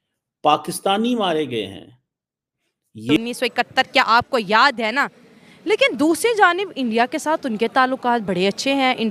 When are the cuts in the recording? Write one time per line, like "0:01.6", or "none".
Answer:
0:03.2